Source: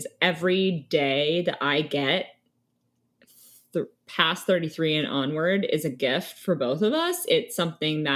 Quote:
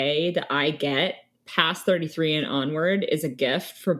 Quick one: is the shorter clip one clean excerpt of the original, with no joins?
no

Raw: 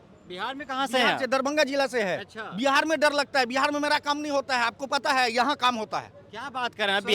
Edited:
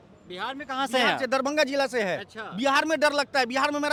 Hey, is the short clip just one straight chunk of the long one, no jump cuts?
yes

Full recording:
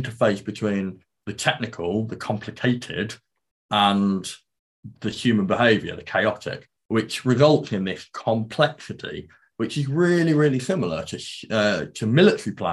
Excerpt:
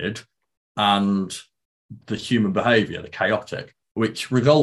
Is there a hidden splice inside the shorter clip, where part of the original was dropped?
no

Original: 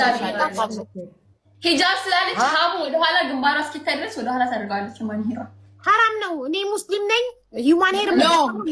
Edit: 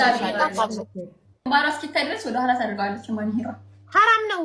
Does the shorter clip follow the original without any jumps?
no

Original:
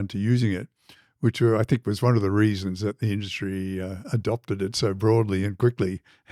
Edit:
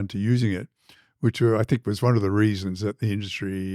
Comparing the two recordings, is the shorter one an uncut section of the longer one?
yes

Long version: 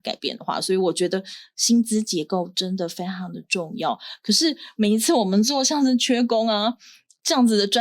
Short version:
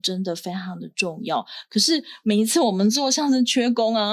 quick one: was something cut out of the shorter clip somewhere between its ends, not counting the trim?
no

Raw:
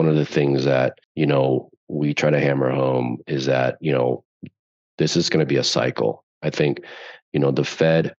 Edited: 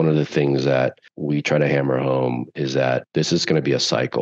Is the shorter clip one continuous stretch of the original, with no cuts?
no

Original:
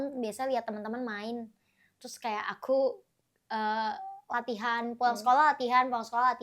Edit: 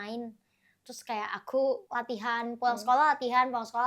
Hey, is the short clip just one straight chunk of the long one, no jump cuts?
no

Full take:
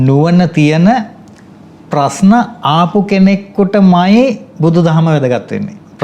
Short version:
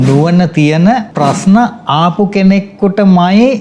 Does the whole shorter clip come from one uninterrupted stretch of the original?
no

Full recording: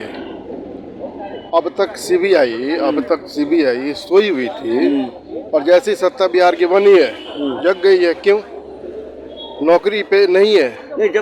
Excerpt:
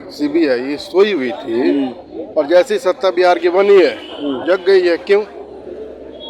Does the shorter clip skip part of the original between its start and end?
no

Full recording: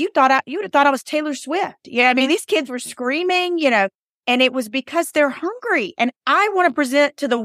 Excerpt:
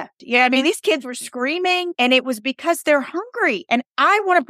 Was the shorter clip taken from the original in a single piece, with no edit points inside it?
no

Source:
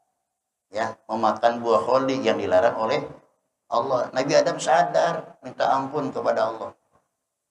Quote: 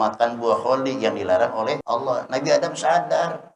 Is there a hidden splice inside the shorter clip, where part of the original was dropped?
yes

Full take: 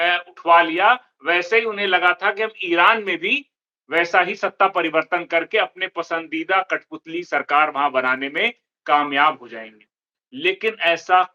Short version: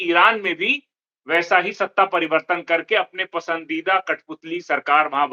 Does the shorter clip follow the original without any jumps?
yes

